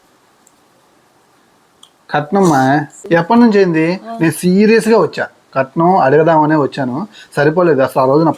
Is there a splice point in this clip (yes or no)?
yes